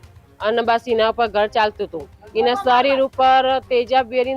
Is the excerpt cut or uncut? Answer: cut